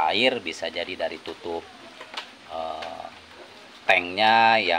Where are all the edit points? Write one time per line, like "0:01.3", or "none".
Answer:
none